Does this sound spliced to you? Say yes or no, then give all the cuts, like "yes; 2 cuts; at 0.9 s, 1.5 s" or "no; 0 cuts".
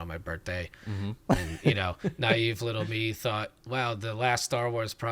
no; 0 cuts